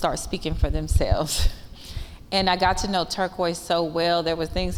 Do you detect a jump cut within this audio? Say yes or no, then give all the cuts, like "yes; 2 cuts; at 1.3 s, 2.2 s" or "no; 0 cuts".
no; 0 cuts